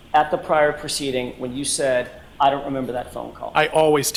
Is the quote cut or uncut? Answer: uncut